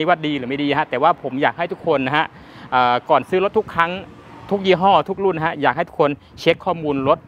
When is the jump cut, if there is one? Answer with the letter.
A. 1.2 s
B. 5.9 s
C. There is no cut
C